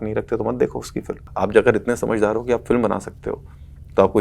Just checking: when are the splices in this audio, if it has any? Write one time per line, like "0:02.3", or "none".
0:01.2